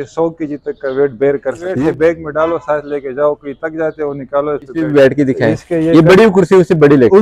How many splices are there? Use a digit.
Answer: 2